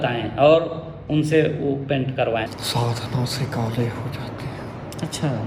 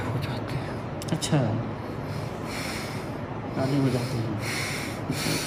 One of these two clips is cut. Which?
first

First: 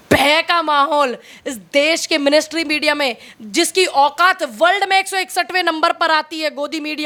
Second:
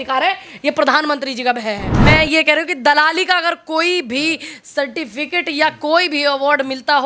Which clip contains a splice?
second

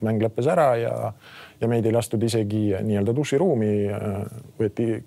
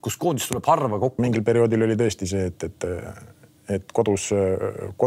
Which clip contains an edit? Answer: second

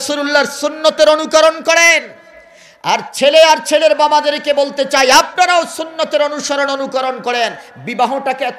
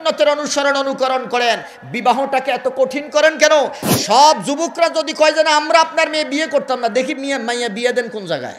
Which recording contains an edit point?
second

